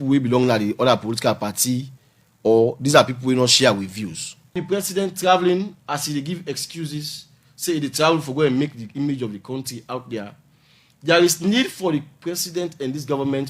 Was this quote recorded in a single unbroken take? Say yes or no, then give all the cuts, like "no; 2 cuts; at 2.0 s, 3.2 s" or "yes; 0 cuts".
no; 1 cut; at 4.6 s